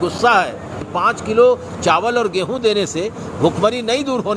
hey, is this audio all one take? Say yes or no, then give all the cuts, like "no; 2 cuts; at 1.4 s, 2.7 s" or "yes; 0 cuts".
no; 1 cut; at 0.9 s